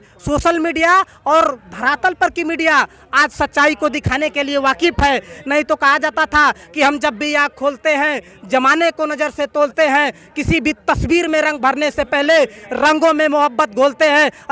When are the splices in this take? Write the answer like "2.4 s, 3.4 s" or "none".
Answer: none